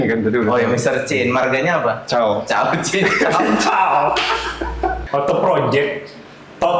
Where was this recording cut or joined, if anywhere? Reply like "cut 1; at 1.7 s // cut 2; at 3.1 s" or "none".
cut 1; at 5.0 s